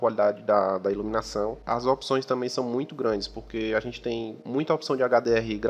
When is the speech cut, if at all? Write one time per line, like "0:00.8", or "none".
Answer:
0:01.6
0:04.4